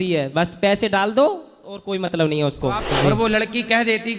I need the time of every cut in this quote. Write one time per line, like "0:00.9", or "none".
0:02.9